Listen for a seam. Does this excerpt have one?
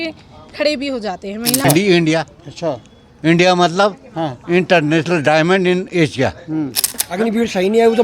yes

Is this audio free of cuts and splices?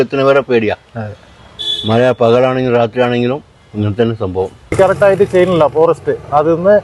no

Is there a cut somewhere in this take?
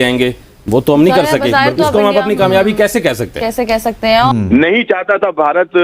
yes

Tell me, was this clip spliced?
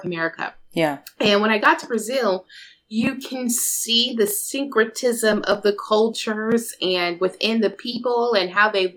no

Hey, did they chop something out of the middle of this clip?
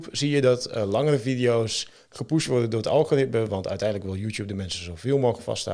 no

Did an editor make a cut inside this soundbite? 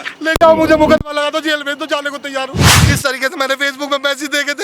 yes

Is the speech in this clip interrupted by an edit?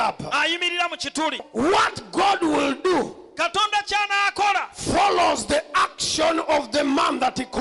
yes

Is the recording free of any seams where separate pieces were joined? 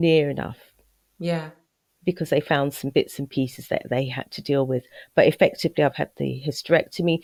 yes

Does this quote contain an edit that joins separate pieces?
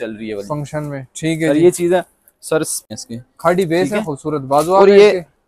yes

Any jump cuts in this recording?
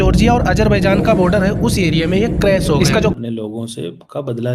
yes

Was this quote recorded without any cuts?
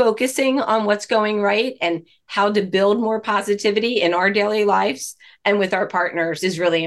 yes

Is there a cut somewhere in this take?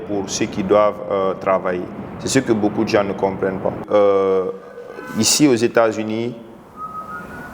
yes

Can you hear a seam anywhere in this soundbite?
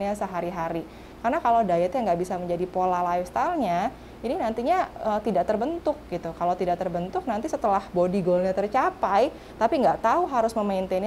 no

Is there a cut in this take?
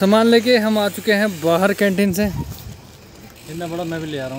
no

